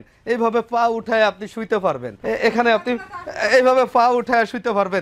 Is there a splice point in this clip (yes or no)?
yes